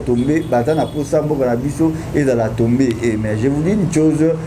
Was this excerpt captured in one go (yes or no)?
yes